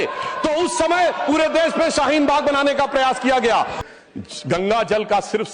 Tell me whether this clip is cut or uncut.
cut